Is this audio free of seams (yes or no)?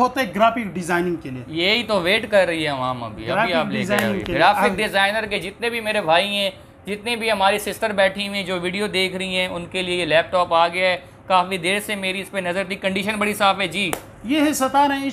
yes